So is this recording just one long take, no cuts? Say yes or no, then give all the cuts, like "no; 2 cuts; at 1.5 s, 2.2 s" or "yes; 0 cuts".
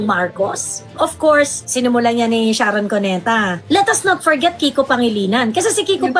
no; 2 cuts; at 0.9 s, 3.6 s